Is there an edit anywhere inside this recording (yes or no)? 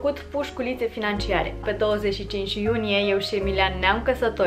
yes